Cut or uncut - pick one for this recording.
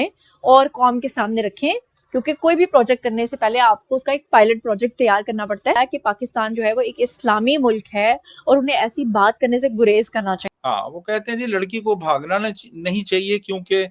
cut